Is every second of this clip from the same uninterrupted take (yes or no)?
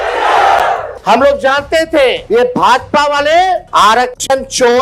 no